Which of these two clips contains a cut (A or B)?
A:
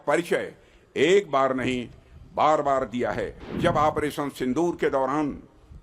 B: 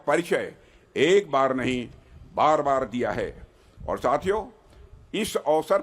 A